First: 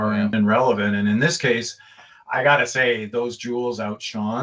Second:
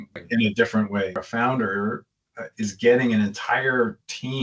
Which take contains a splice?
second; 1 cut; at 1.3 s

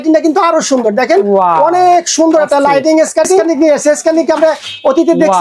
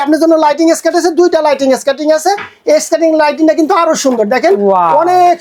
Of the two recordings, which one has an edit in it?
first; 1 cut; at 3.5 s

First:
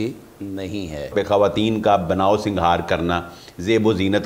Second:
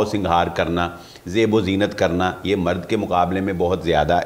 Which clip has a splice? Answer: first; 1 cut; at 1.1 s

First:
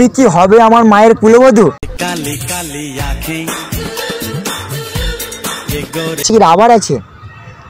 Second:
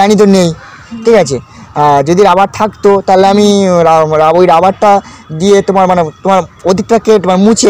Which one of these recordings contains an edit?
first; 1 cut; at 6.2 s

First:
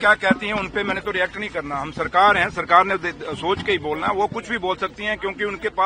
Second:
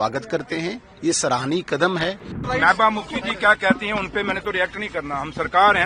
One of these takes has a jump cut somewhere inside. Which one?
second; 1 cut; at 2.4 s

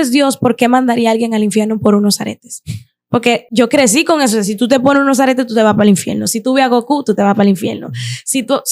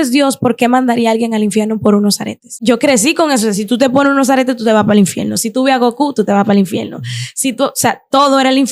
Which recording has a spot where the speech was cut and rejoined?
second; 1 cut; at 2.5 s

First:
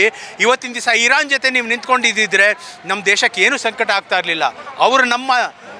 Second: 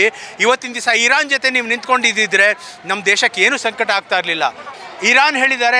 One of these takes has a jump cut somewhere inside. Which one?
second; 1 cut; at 4.7 s

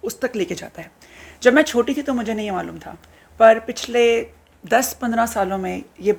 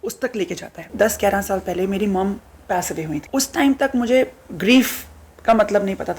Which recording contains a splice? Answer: second; 2 cuts; at 0.9 s, 3.2 s

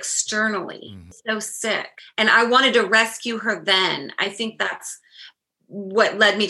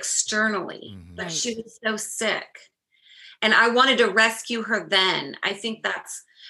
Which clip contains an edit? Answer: first; 2 cuts; at 1.1 s, 2.0 s

